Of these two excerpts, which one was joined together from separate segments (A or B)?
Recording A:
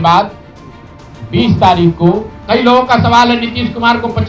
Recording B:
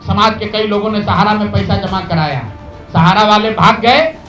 A